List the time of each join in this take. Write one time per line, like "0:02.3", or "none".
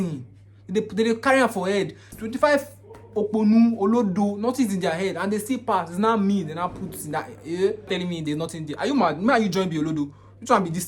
0:02.1
0:07.9